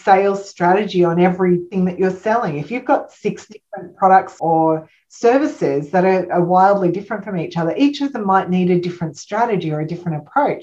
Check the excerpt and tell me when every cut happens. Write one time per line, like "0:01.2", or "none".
0:01.7